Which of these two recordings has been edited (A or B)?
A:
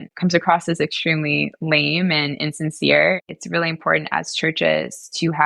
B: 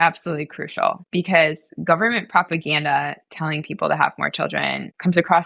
A